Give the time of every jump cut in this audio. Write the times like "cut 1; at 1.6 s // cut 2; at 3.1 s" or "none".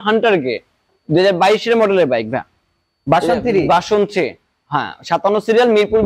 none